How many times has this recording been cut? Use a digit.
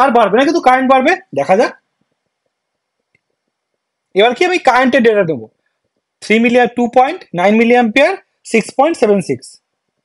0